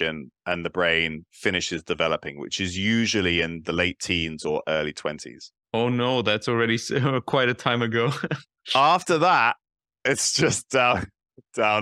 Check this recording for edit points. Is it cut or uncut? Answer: uncut